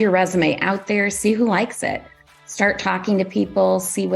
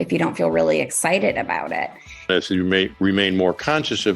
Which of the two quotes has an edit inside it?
second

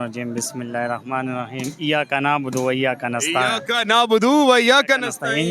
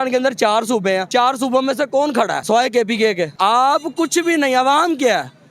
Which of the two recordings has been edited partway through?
second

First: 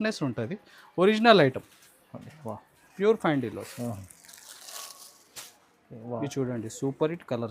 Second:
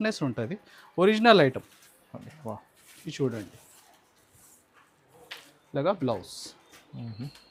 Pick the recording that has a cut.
first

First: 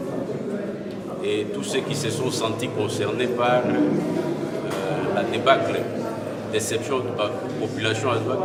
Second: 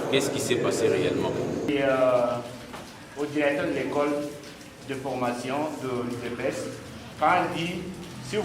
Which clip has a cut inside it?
second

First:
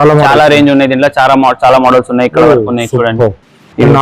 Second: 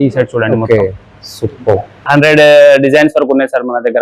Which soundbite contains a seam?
second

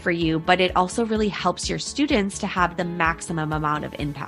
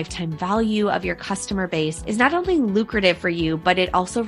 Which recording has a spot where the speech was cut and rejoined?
second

